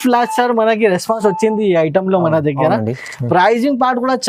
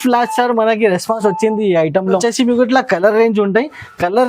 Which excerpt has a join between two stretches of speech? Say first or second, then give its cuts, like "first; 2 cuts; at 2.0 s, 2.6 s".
second; 1 cut; at 2.2 s